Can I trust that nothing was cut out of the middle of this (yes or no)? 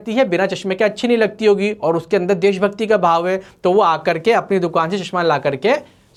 yes